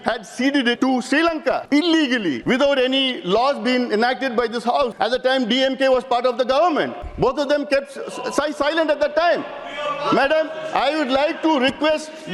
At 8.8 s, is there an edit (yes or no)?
no